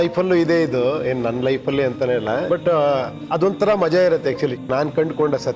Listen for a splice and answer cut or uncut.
cut